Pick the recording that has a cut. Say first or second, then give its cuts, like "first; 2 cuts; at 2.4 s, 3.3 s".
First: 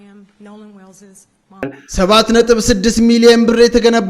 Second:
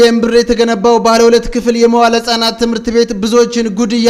first; 1 cut; at 1.8 s